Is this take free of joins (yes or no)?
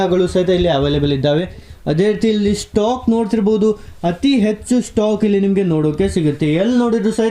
no